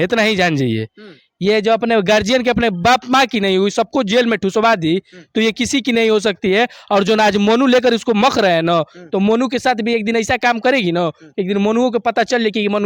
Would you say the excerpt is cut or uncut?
uncut